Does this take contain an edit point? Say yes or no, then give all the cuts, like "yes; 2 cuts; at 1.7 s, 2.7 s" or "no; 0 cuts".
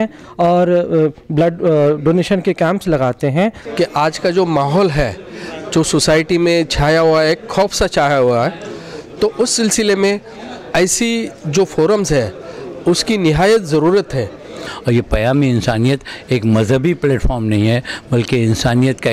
yes; 2 cuts; at 3.6 s, 14.7 s